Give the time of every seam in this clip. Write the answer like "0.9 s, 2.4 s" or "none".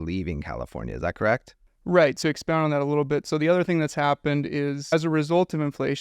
2.2 s, 4.9 s